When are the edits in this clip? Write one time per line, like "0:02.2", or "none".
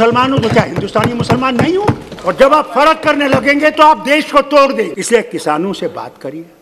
0:02.1
0:05.0

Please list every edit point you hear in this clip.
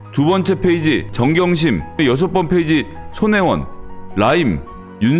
0:01.1
0:02.0

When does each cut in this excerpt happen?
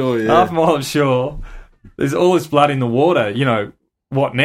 none

